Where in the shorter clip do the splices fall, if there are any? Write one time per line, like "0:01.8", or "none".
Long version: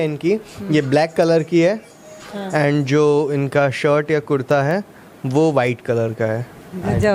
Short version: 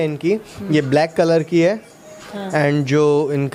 none